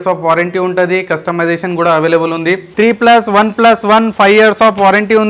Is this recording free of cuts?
no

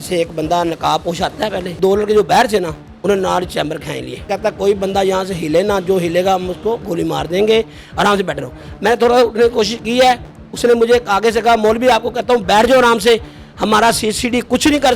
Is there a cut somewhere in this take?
yes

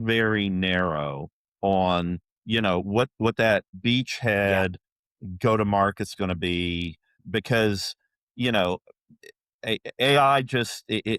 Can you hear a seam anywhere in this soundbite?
yes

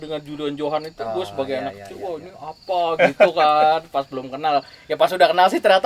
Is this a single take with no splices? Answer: yes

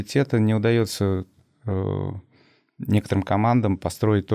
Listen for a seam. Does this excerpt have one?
no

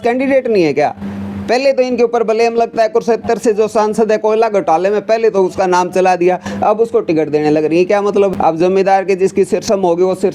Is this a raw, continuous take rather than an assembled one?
no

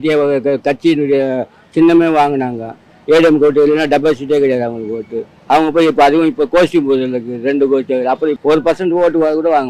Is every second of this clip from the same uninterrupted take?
no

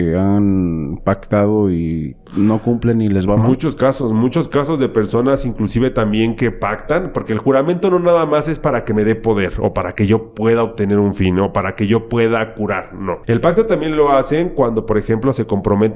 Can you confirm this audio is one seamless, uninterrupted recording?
no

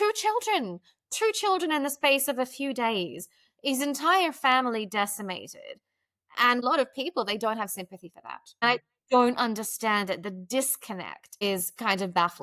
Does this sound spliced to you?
yes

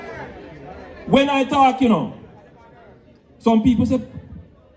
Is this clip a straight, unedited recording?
yes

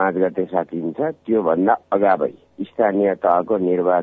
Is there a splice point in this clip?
no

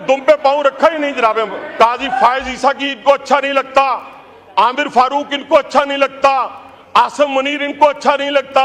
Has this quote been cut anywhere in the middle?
yes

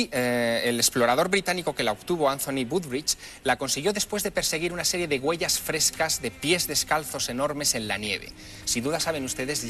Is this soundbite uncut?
no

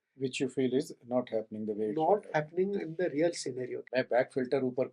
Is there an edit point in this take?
yes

